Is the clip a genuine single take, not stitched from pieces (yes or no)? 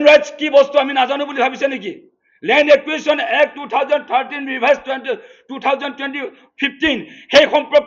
yes